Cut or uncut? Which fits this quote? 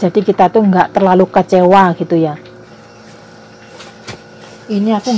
cut